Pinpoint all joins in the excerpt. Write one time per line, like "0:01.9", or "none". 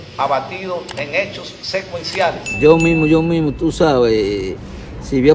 0:02.5